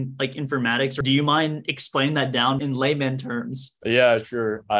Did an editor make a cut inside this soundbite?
yes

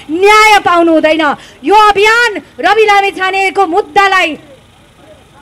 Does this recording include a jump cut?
no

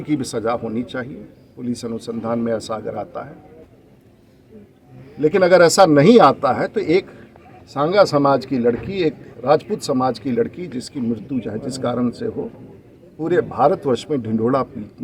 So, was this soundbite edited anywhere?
no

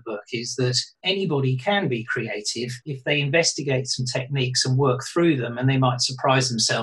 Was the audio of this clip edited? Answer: yes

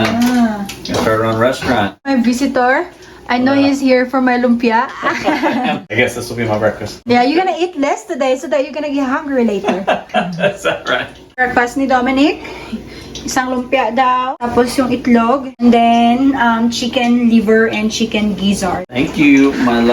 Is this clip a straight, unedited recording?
no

